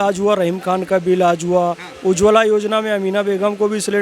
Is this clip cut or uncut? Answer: uncut